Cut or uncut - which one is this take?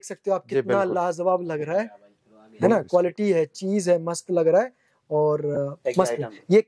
uncut